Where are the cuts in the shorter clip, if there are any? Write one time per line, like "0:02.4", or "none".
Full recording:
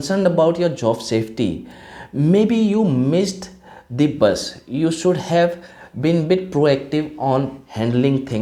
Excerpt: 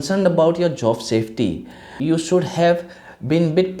0:01.8